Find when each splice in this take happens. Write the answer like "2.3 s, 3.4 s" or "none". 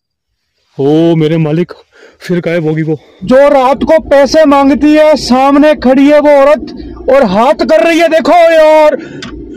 3.2 s